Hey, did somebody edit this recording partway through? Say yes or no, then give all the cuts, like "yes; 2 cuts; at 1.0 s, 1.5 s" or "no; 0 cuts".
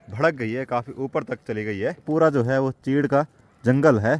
yes; 1 cut; at 2.1 s